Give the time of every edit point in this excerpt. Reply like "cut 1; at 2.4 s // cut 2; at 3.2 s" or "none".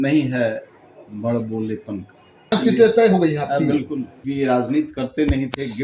cut 1; at 2.5 s // cut 2; at 4.1 s